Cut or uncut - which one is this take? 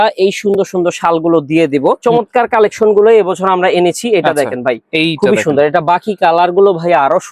cut